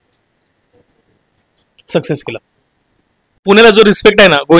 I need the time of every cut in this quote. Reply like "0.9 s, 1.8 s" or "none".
3.4 s